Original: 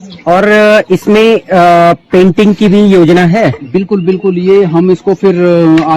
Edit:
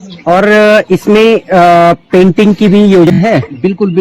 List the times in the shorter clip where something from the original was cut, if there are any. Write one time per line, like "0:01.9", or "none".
0:03.1

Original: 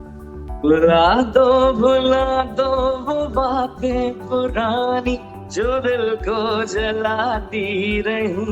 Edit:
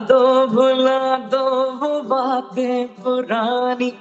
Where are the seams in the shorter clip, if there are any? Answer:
none

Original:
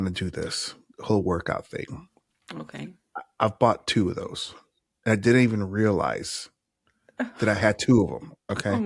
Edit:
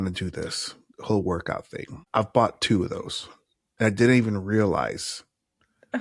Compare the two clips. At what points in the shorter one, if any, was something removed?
0:02.0

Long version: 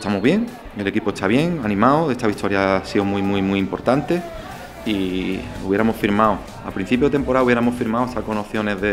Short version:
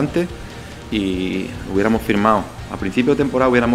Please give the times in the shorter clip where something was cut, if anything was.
none

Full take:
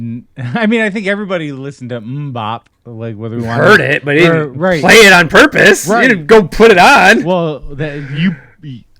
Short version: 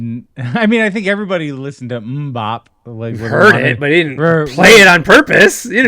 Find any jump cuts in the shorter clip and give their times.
0:03.3

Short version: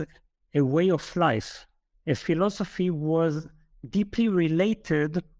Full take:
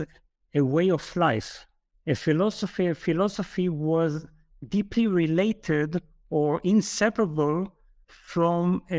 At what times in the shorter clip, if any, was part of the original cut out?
0:02.2

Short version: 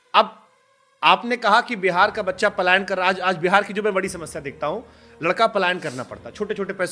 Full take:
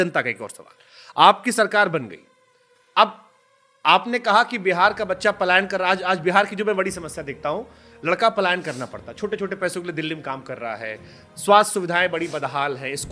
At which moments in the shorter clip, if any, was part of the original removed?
none

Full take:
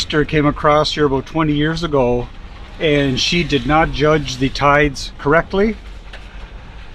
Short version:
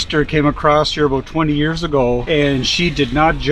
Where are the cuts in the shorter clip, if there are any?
0:02.2

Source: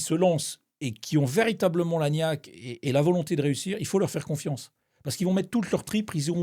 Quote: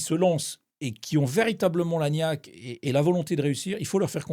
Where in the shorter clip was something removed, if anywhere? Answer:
none

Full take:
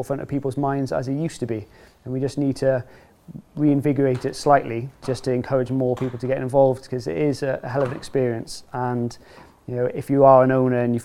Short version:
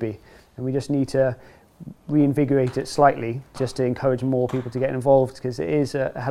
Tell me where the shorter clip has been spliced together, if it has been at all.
none

